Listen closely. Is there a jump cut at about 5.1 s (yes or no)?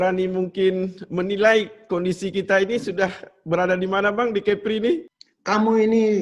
yes